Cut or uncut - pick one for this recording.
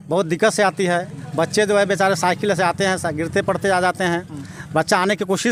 uncut